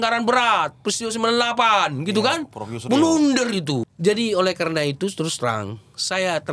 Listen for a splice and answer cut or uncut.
cut